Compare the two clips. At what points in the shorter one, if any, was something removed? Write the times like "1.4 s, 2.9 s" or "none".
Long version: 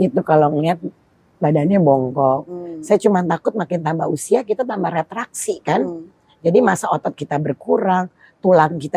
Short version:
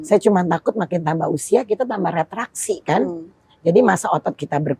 none